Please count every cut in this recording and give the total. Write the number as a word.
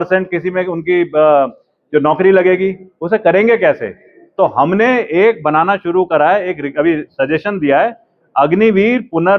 zero